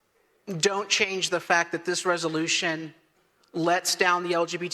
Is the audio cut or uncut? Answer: uncut